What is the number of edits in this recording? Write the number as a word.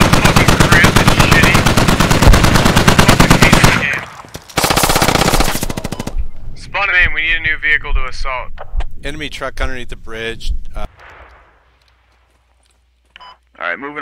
one